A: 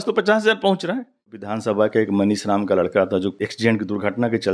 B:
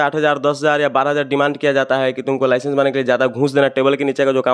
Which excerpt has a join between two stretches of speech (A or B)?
A